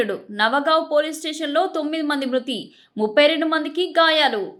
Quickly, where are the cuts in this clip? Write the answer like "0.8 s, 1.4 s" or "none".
none